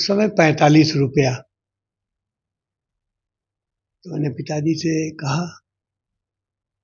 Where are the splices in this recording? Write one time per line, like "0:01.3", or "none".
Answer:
none